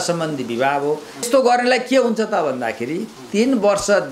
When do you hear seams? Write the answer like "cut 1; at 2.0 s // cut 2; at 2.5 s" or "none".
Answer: cut 1; at 1.3 s